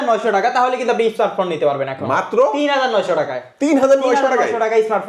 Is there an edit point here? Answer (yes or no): no